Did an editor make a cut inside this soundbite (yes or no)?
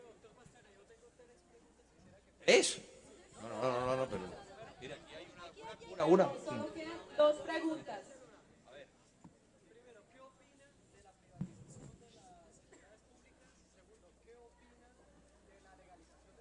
yes